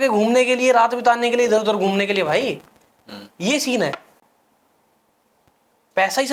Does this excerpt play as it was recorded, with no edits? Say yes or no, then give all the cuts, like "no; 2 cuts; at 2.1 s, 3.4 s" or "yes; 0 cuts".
yes; 0 cuts